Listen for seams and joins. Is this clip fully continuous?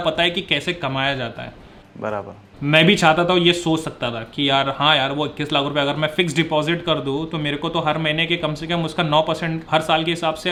yes; 0 cuts

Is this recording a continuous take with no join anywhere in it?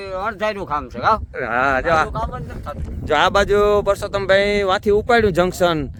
yes; 0 cuts

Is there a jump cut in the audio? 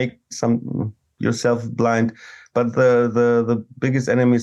no; 0 cuts

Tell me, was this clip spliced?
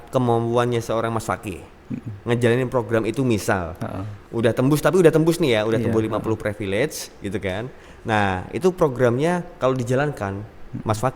no; 0 cuts

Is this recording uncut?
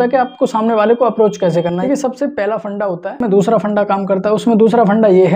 no; 2 cuts; at 1.7 s, 3.2 s

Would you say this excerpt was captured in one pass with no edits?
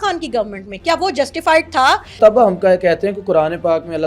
no; 1 cut; at 2.2 s

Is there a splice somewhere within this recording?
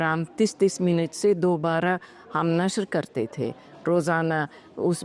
no; 0 cuts

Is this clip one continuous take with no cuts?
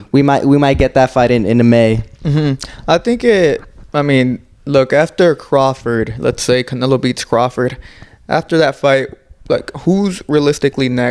yes; 0 cuts

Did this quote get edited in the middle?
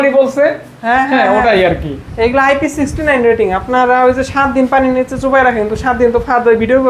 no; 0 cuts

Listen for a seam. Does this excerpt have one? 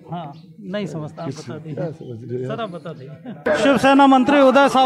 yes; 1 cut; at 3.4 s

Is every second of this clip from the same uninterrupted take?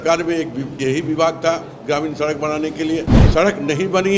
no; 1 cut; at 3.2 s

